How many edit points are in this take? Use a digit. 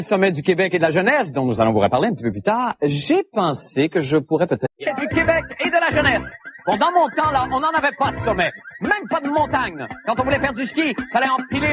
0